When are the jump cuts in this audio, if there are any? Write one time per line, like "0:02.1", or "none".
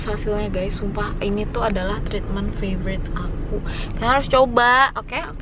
none